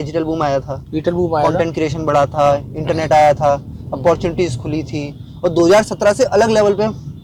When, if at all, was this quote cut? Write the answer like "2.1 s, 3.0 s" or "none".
none